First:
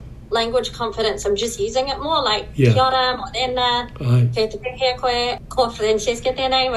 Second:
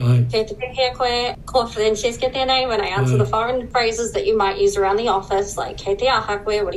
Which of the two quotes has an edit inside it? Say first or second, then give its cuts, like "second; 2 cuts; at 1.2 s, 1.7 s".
second; 1 cut; at 3.7 s